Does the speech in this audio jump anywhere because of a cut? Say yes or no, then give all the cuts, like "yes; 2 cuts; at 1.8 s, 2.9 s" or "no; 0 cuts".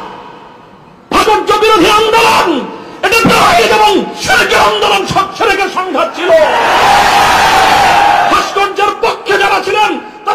yes; 1 cut; at 1.2 s